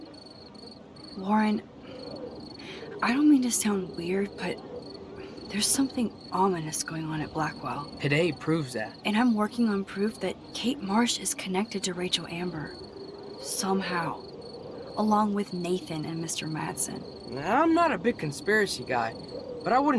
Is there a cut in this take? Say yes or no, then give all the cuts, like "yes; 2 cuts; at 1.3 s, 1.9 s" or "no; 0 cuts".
yes; 1 cut; at 1.1 s